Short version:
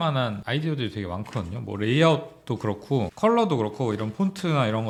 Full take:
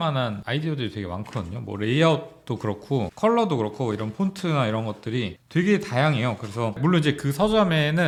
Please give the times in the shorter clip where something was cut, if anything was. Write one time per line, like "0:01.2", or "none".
none